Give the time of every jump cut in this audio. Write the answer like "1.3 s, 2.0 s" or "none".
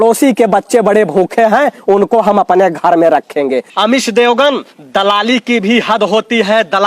3.7 s